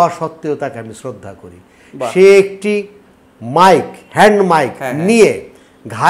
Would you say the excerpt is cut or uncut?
uncut